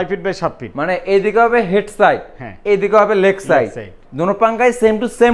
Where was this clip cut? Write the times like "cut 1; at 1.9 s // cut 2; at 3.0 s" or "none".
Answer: none